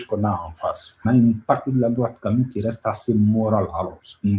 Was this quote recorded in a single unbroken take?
no; 1 cut; at 0.9 s

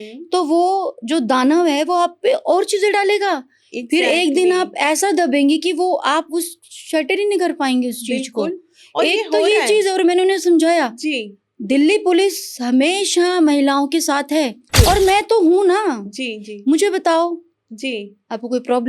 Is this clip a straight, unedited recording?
no; 1 cut; at 14.6 s

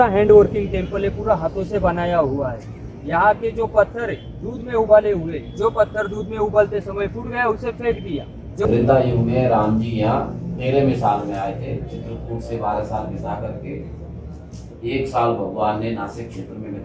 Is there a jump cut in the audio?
yes; 1 cut; at 8.7 s

